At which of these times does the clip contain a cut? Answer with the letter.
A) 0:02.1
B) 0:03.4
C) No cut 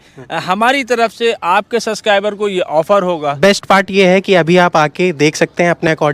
B